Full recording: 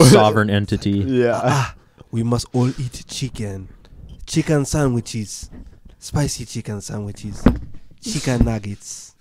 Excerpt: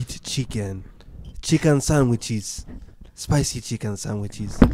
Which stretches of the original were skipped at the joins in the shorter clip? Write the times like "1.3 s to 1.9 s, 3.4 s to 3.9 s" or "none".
none